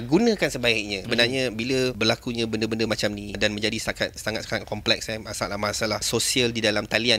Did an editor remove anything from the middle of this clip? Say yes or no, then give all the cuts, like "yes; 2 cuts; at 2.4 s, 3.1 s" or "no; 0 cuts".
yes; 4 cuts; at 1.0 s, 2.0 s, 3.4 s, 6.1 s